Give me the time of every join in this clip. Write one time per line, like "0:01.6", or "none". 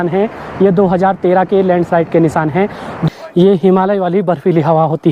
0:02.9